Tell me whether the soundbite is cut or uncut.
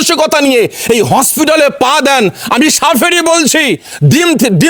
uncut